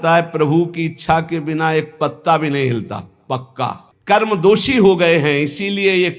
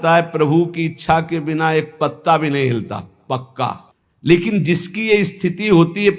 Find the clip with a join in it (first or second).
first